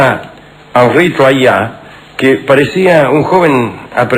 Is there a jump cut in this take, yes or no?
yes